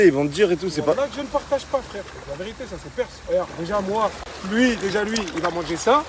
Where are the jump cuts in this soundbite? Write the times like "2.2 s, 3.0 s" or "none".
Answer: 3.9 s